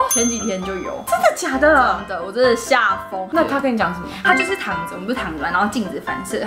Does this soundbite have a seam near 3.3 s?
yes; 1 cut; at 3.3 s

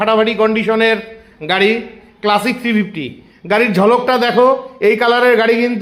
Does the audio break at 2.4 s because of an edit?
no; 0 cuts

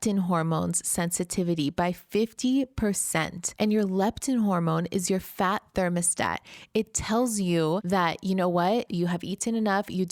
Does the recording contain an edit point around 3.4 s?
yes; 2 cuts; at 3.4 s, 7.8 s

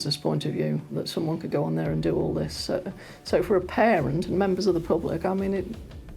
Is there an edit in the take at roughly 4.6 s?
no; 1 cut; at 0.9 s

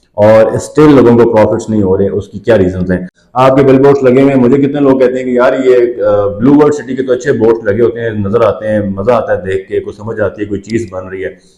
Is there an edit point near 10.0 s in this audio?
no; 1 cut; at 3.2 s

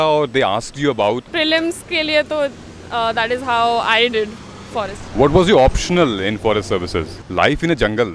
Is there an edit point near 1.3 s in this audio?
yes; 2 cuts; at 1.3 s, 7.2 s

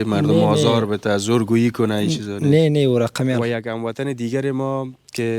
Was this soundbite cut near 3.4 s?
yes; 1 cut; at 3.4 s

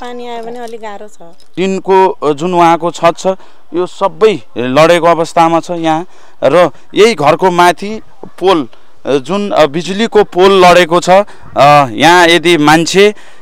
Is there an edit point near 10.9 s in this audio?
no; 1 cut; at 1.5 s

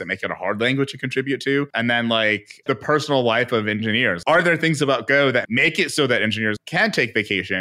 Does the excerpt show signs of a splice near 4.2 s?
yes; 5 cuts; at 1.7 s, 2.6 s, 4.2 s, 5.5 s, 6.6 s

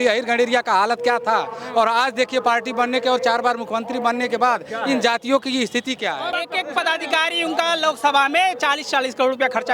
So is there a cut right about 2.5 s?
no; 1 cut; at 6.3 s

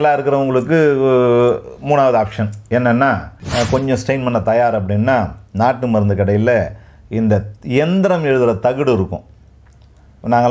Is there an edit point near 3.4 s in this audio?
yes; 1 cut; at 3.4 s

